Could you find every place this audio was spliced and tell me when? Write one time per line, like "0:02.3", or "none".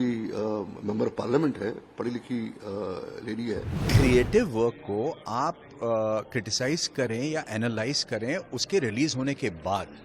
0:03.8